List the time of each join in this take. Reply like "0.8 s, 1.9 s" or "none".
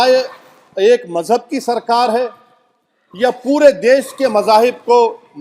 none